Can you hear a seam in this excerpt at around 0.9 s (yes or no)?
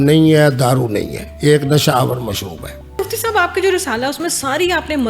no